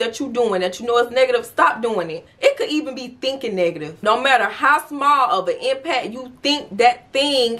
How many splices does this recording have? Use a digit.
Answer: 2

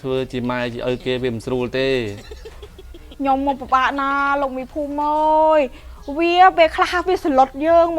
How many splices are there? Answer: 0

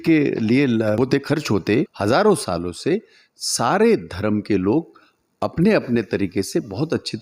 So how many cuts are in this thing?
2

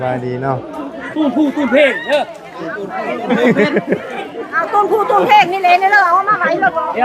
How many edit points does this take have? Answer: 1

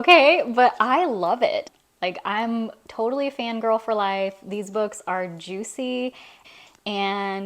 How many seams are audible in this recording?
2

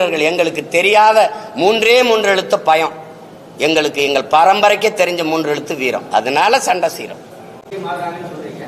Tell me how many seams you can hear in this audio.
1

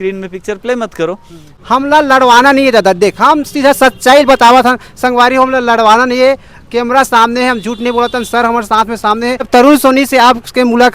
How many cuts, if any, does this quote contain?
2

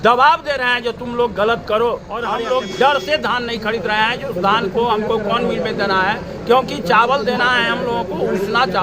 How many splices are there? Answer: 1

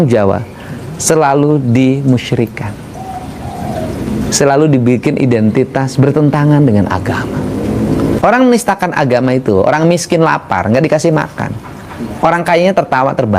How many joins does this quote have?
1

